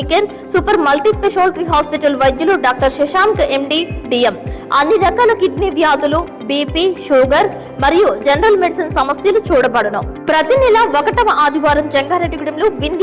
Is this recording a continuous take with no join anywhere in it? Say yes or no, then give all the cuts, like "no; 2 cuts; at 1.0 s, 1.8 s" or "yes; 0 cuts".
yes; 0 cuts